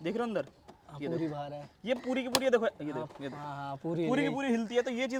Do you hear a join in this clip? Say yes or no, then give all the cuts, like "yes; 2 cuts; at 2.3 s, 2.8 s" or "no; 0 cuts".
no; 0 cuts